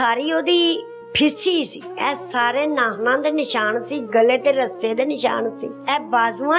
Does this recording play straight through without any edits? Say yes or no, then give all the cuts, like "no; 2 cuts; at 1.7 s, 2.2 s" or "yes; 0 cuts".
no; 3 cuts; at 1.0 s, 1.8 s, 5.7 s